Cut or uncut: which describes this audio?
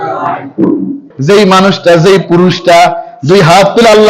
cut